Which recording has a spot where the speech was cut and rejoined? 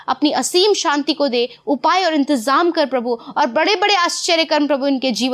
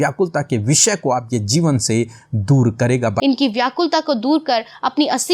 second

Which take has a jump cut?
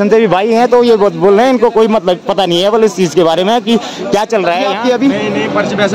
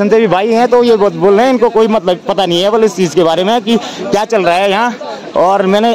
first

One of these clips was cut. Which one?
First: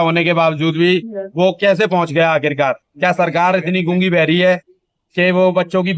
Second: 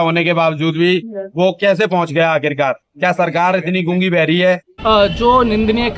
second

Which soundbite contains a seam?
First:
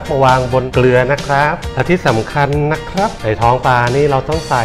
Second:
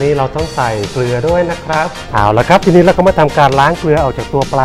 second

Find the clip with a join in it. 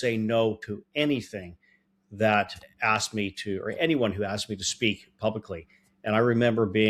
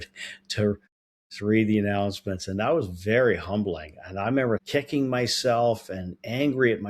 second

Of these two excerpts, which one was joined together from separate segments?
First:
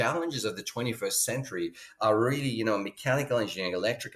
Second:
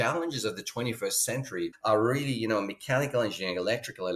second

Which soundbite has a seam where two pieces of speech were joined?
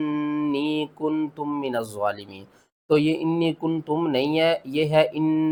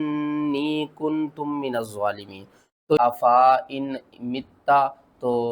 second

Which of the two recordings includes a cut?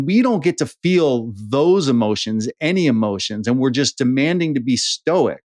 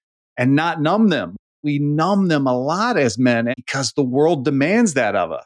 second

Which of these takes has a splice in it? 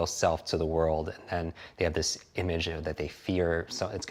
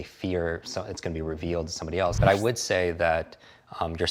second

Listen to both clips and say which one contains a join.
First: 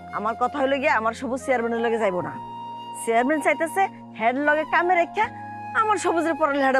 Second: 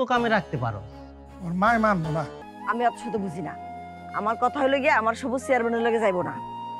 second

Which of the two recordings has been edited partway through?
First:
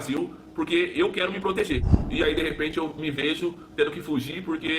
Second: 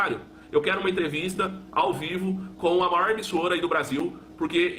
first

